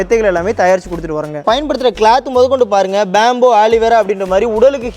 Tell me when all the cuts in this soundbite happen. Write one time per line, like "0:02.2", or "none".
0:01.4

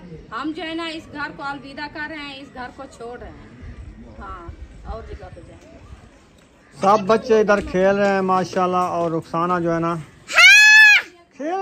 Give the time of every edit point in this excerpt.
0:06.8

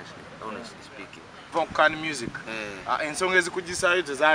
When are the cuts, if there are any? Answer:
0:01.5

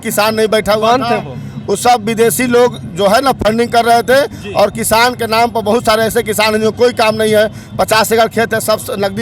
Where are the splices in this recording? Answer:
none

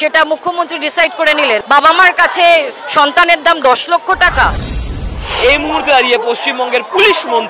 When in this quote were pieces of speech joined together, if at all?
0:01.6
0:05.2

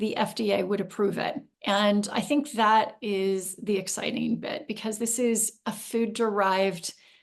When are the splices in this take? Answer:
0:01.5

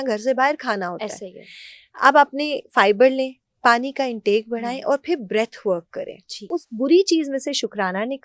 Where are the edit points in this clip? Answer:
0:06.5

